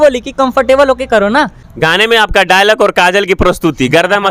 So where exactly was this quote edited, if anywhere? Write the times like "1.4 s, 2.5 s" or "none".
1.7 s